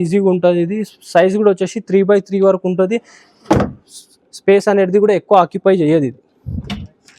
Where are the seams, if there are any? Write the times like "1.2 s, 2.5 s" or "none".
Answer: none